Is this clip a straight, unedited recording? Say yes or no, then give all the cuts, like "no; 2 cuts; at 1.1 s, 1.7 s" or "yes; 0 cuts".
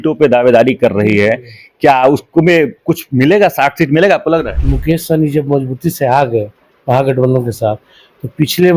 no; 1 cut; at 4.5 s